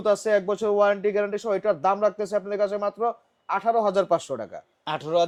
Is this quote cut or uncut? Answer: uncut